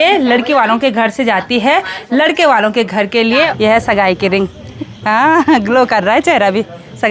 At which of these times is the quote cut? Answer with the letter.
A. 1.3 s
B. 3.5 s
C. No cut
B